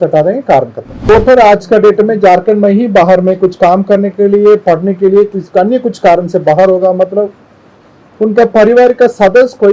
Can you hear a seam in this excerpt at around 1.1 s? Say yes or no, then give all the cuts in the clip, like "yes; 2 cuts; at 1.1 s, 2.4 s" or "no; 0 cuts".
yes; 1 cut; at 1.1 s